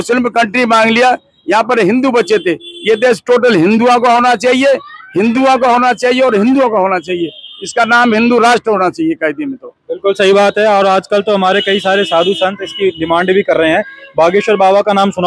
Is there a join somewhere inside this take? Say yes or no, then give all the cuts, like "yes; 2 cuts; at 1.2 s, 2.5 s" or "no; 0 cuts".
no; 0 cuts